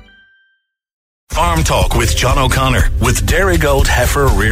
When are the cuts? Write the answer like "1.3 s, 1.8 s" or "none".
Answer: 1.3 s